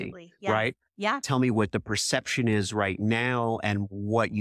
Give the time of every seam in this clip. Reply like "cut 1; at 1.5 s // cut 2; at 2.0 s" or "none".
cut 1; at 1.2 s